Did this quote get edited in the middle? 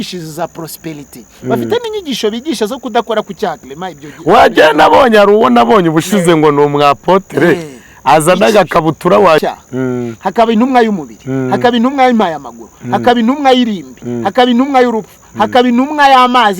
yes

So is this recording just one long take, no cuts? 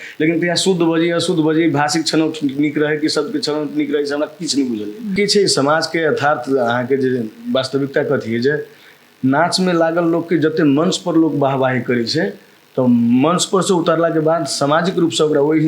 no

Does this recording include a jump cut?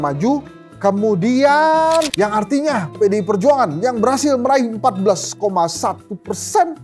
yes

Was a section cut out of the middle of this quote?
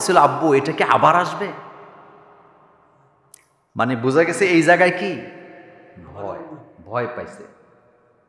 no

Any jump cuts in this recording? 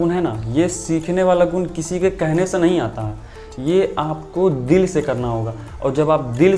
no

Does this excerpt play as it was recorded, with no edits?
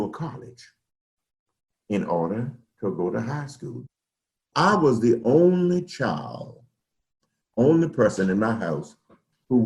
no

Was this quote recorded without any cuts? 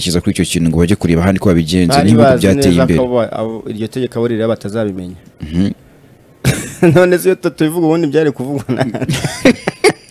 yes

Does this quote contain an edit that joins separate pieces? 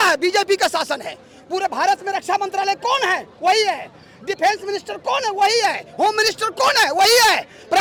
no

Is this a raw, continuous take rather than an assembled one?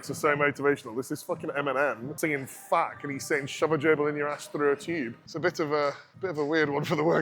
no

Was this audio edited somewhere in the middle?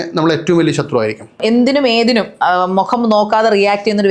yes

